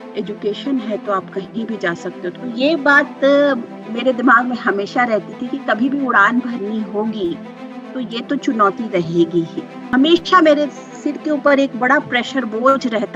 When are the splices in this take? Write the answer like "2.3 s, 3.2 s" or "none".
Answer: 2.4 s, 9.9 s